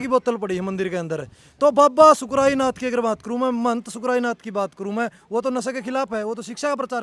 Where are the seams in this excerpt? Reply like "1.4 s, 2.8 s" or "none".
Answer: none